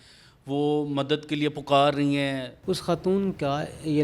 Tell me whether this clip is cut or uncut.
cut